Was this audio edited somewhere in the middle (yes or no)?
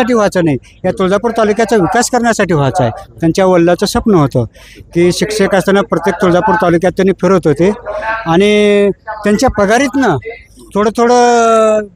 no